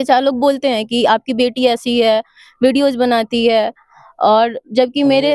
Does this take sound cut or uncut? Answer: uncut